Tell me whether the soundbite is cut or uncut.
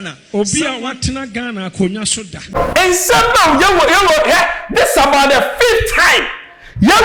cut